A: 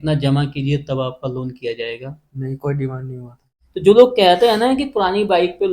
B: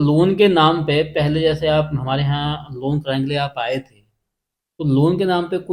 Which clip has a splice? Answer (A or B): A